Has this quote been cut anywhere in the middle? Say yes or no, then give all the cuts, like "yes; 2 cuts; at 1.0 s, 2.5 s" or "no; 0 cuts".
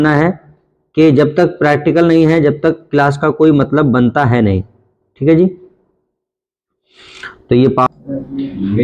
yes; 1 cut; at 7.9 s